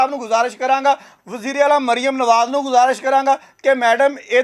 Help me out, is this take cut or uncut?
uncut